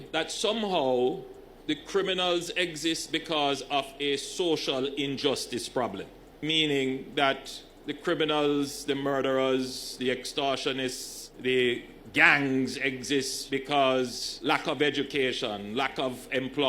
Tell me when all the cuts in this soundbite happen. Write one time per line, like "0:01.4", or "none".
0:06.5

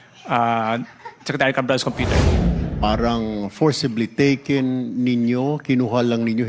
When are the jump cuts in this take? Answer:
0:02.5

